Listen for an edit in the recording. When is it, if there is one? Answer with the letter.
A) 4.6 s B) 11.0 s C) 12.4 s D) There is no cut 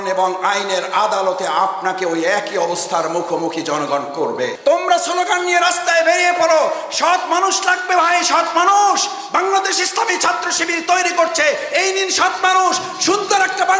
A